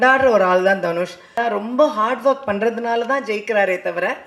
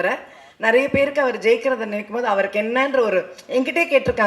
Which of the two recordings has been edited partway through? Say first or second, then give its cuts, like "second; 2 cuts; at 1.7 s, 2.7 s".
first; 1 cut; at 1.4 s